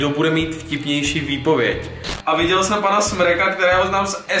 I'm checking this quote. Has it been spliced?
yes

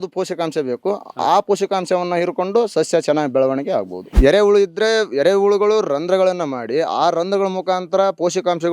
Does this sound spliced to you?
yes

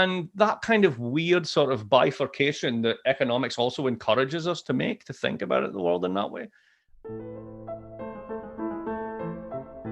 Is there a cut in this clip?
yes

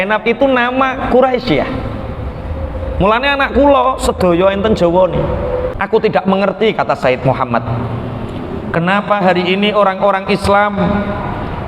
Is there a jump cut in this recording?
yes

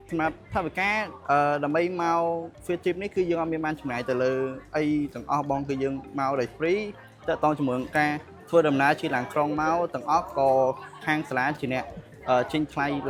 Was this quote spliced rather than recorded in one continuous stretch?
no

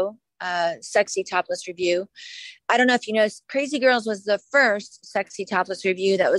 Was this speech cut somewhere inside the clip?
no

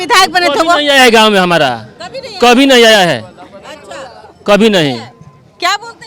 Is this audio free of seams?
yes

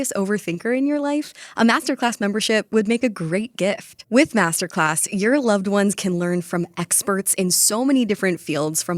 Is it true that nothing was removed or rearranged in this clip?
yes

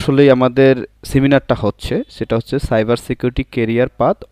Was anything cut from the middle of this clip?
yes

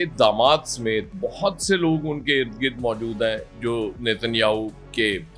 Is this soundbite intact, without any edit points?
yes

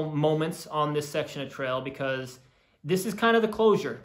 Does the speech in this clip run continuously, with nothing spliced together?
yes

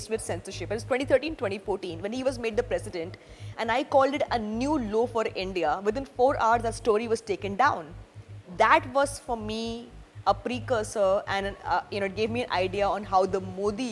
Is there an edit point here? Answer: no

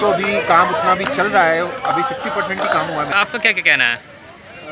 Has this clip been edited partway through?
yes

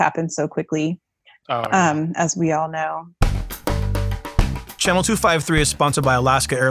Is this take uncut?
no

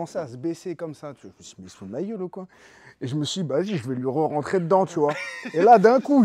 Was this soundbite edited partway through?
no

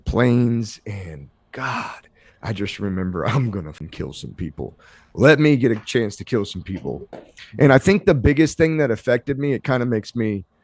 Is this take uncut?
no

